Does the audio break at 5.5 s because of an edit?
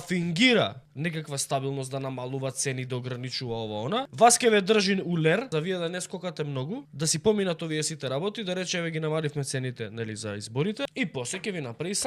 yes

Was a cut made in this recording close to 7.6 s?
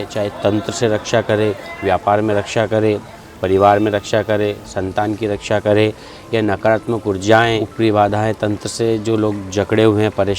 yes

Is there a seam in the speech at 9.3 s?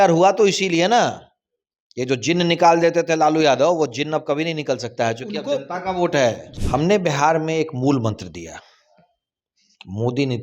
no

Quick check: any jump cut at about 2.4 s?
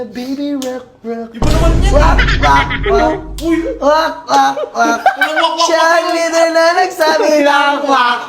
no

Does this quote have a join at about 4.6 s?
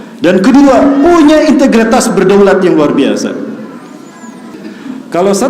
yes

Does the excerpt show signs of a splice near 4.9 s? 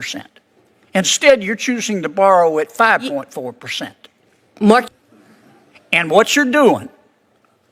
yes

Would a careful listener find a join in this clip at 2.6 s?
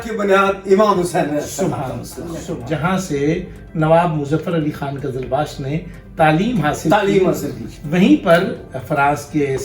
yes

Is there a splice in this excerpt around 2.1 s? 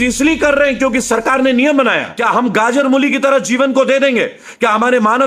yes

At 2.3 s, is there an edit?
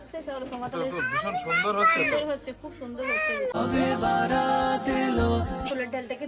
no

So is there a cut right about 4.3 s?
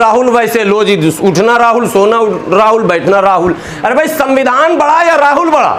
no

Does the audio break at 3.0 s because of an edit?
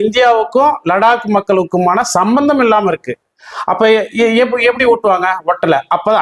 no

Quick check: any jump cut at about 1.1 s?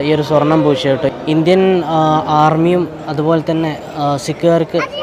yes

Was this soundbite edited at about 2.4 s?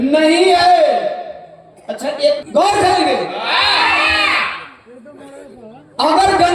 yes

